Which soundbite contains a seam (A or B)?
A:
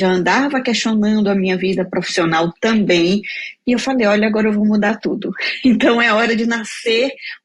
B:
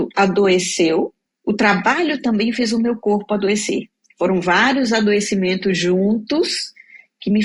B